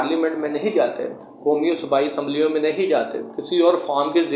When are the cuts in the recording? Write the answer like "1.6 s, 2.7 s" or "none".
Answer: none